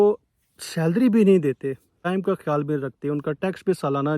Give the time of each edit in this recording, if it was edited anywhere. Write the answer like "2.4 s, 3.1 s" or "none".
2.0 s